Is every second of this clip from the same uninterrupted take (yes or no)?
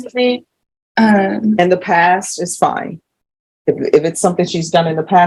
yes